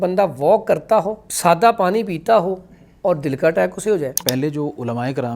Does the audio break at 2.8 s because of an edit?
no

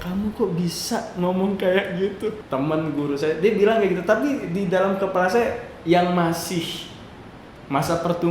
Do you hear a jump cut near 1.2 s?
no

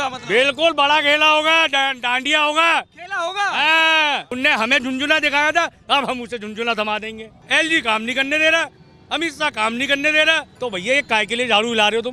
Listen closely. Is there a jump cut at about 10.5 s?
yes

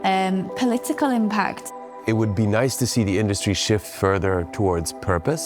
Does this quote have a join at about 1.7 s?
yes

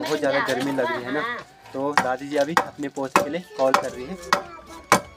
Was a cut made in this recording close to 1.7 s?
no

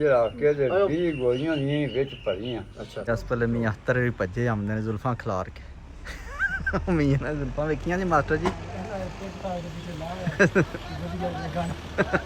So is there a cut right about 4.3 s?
no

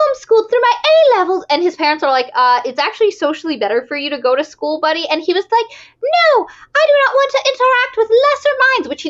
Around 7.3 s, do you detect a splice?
no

